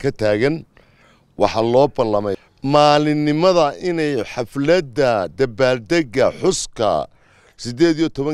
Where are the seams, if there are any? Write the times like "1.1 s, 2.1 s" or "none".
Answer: 2.4 s